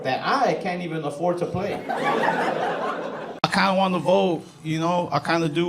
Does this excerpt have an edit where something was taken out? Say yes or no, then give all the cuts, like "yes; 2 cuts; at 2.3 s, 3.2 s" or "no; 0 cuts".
yes; 1 cut; at 3.4 s